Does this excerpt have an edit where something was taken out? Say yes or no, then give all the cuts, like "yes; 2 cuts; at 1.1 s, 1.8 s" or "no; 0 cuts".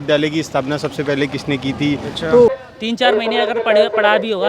yes; 1 cut; at 2.6 s